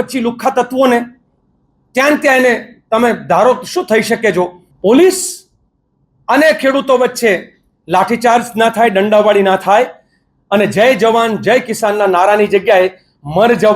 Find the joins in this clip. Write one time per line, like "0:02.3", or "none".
0:04.6